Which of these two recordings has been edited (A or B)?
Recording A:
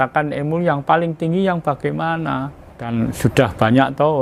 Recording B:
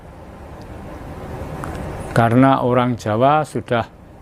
A